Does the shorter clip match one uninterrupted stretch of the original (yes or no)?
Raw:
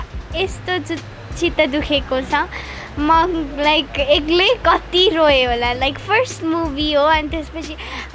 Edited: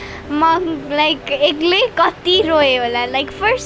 yes